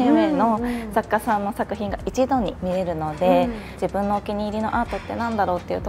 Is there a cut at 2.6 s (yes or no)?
yes